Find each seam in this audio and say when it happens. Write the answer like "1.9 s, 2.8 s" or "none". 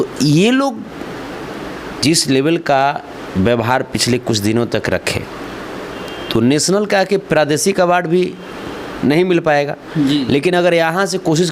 none